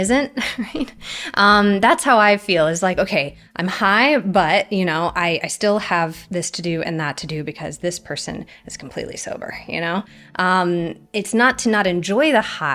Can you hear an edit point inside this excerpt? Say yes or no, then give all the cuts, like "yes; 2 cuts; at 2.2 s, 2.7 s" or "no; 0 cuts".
no; 0 cuts